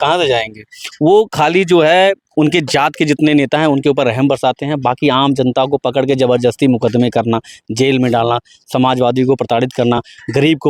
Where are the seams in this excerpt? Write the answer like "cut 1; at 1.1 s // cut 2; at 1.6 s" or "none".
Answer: none